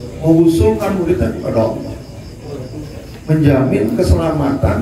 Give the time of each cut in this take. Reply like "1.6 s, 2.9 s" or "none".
none